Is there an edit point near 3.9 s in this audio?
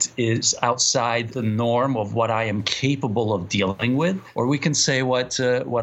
yes; 2 cuts; at 1.3 s, 3.9 s

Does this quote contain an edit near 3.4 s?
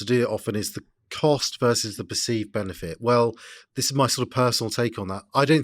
no; 0 cuts

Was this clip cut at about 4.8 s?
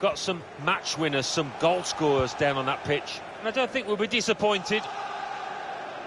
yes; 1 cut; at 4.8 s

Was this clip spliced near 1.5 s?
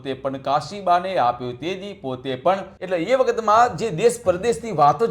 no; 1 cut; at 2.7 s

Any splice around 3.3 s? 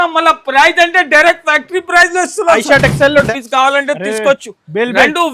yes; 1 cut; at 3.3 s

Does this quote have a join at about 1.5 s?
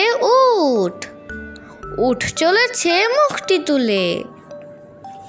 no; 1 cut; at 4.4 s

